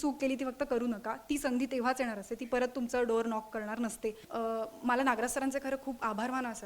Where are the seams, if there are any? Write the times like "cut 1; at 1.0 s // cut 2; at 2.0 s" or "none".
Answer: cut 1; at 4.3 s